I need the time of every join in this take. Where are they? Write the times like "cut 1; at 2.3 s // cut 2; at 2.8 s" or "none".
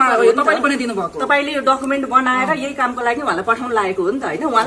none